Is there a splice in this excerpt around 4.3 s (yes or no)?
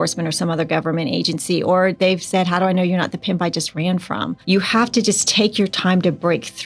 yes